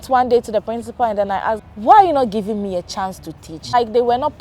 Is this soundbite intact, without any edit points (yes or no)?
no